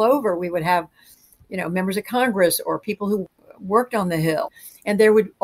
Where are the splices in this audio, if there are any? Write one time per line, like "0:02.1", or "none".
0:03.2
0:04.6